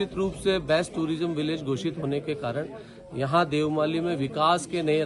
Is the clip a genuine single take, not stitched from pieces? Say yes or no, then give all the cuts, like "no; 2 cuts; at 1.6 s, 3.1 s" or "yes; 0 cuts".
yes; 0 cuts